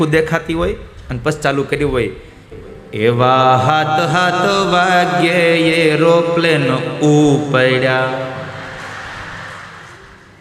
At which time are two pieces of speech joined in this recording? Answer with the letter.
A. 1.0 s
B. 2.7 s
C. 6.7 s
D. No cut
D